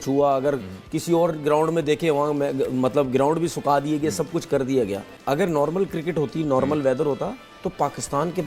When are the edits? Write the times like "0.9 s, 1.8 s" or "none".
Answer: 5.1 s